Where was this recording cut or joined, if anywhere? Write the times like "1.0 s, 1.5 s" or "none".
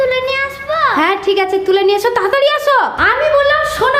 3.0 s